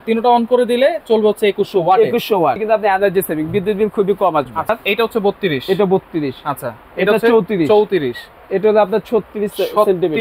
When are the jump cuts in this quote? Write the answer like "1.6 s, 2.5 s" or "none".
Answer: 2.6 s, 4.7 s